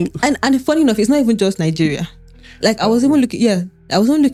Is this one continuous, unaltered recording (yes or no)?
yes